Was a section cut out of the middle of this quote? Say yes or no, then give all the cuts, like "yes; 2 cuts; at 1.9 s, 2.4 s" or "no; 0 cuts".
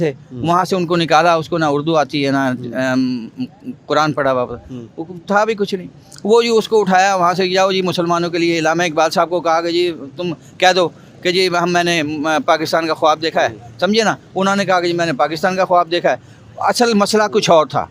no; 0 cuts